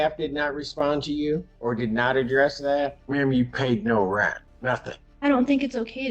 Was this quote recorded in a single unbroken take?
no; 3 cuts; at 1.5 s, 3.0 s, 4.8 s

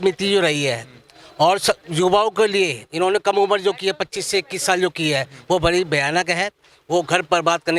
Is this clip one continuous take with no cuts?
yes; 0 cuts

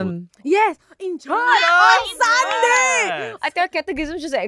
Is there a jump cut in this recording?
yes; 1 cut; at 3.3 s

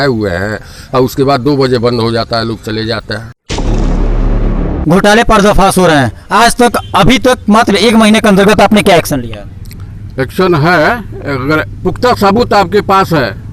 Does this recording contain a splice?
yes; 2 cuts; at 3.5 s, 4.8 s

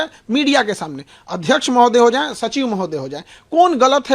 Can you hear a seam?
no; 0 cuts

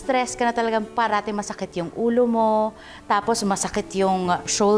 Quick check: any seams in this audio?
no; 0 cuts

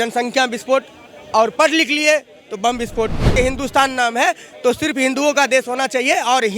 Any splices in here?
yes; 1 cut; at 3.3 s

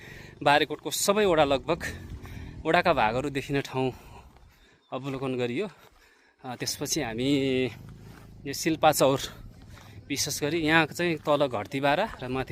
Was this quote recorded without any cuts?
yes; 0 cuts

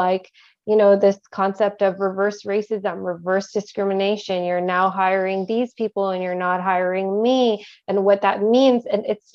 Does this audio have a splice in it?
no; 0 cuts

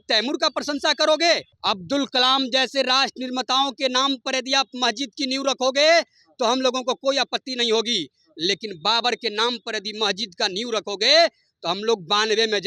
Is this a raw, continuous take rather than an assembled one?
no; 1 cut; at 1.5 s

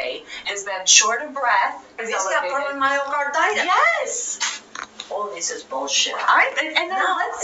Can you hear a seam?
yes; 1 cut; at 2.0 s

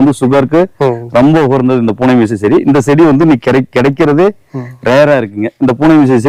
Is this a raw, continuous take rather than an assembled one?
yes; 0 cuts

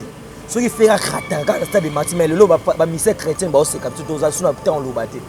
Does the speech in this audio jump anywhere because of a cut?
no; 0 cuts

